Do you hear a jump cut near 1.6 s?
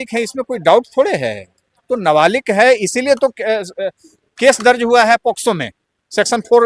no; 0 cuts

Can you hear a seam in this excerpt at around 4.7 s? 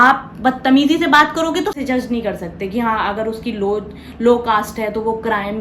no; 1 cut; at 1.8 s

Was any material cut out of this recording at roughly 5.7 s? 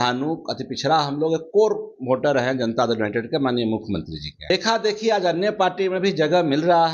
no; 1 cut; at 4.5 s

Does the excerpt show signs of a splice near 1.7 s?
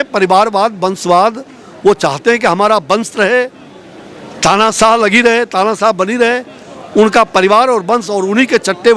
no; 0 cuts

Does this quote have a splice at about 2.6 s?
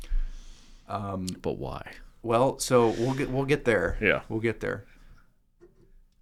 no; 0 cuts

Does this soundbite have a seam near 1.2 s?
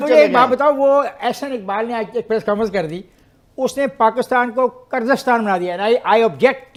no; 0 cuts

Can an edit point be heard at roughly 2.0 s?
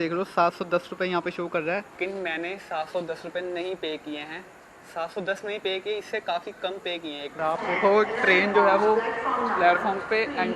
yes; 2 cuts; at 2.0 s, 7.3 s

